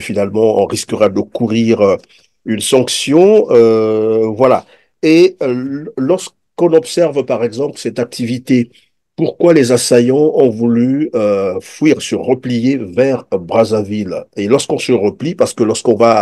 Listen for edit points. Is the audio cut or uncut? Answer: uncut